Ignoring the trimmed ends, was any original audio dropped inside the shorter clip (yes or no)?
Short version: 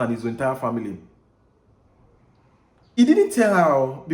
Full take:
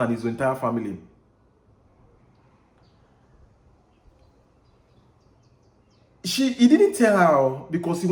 yes